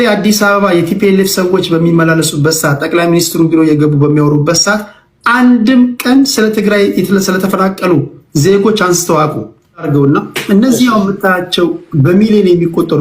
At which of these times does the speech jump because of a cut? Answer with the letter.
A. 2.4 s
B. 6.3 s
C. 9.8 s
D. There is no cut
C